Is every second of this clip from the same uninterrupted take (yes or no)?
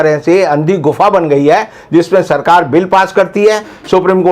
yes